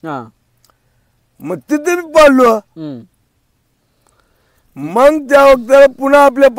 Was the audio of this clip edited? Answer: no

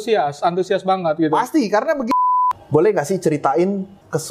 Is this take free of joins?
no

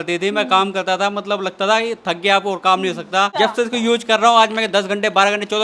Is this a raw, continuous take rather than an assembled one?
no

